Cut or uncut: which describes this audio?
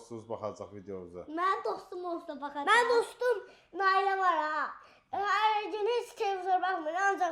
uncut